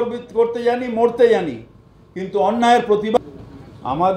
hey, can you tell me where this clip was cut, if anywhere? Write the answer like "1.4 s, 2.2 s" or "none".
3.2 s

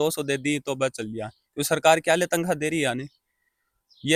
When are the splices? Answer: none

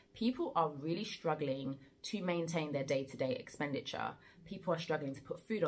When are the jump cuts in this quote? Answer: none

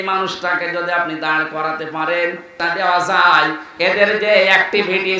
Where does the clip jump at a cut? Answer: 2.6 s

